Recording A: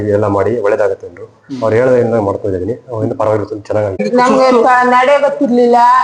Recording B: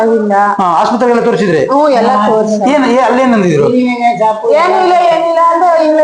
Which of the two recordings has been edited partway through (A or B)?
A